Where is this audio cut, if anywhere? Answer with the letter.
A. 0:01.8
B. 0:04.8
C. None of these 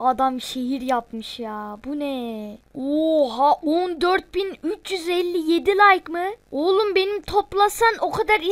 C